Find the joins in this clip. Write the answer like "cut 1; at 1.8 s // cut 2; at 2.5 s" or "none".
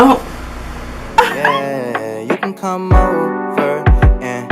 cut 1; at 1.3 s